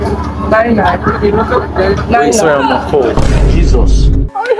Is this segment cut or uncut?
uncut